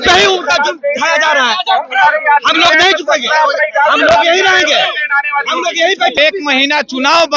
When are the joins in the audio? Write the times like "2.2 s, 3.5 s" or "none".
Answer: 6.2 s